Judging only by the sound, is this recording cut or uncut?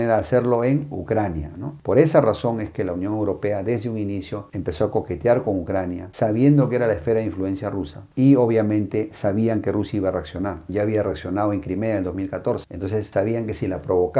uncut